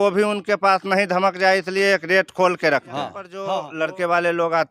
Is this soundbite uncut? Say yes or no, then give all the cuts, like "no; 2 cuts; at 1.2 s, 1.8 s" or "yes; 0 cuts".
no; 1 cut; at 3.4 s